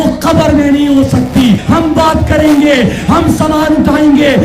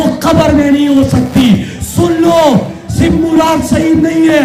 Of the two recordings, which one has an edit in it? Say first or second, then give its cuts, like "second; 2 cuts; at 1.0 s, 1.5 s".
first; 1 cut; at 1.6 s